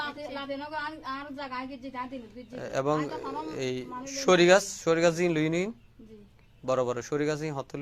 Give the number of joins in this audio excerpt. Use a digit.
0